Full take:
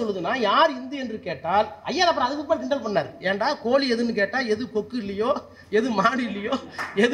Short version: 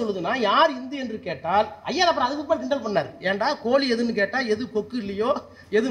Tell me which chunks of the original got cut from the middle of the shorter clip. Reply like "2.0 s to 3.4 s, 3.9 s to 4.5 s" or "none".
none